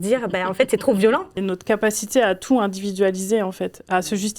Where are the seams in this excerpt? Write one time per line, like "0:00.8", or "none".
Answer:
0:01.3